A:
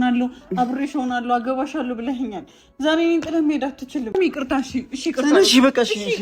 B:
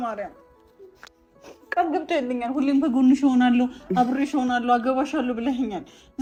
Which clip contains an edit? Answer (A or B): A